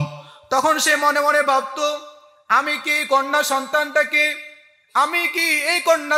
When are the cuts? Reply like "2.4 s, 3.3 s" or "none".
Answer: none